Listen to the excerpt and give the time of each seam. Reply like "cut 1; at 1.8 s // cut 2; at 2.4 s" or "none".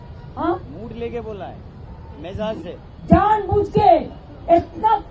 none